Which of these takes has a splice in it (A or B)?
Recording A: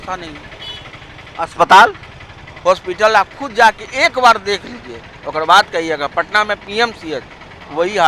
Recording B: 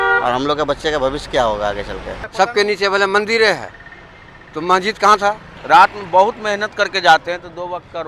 B